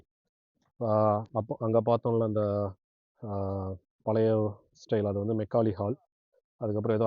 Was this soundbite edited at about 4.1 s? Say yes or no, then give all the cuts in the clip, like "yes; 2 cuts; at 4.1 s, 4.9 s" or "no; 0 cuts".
no; 0 cuts